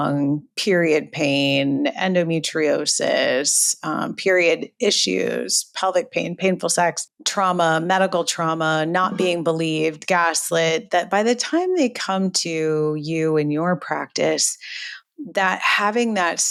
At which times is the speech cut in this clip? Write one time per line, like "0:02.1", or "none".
none